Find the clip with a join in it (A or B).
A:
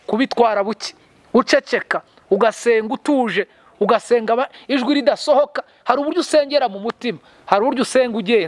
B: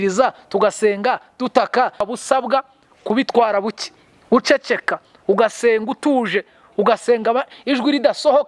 B